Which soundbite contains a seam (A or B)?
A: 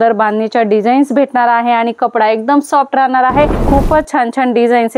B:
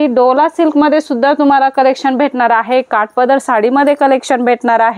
A